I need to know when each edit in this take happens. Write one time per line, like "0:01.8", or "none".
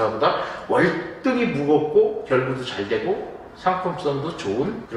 none